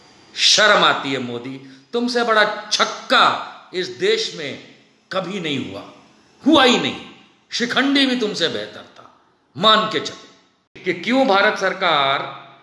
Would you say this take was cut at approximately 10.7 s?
yes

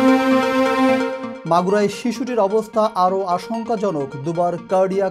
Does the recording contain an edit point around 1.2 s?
yes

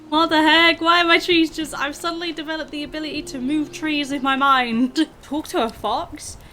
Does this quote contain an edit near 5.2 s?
yes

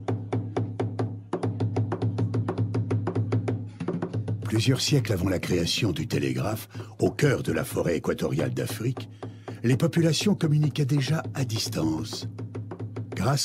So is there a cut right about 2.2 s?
no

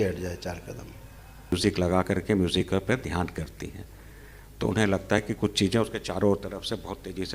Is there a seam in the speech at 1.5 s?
yes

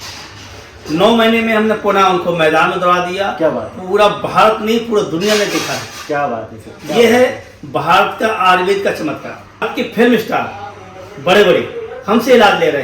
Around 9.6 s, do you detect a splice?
yes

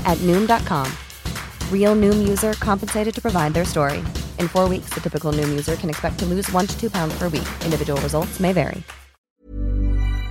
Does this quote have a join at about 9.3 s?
yes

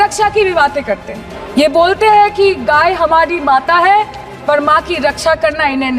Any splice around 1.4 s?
yes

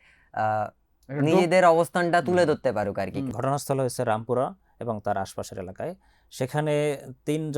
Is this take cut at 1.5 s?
no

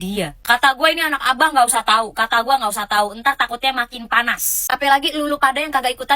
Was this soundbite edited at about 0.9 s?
no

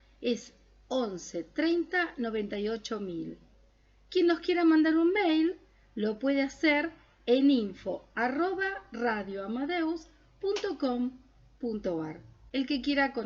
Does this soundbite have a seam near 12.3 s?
yes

